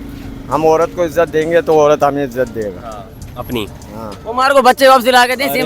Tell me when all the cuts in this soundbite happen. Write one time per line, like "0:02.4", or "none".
0:04.1